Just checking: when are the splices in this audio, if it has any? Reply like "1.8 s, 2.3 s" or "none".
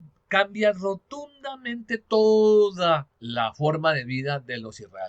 3.2 s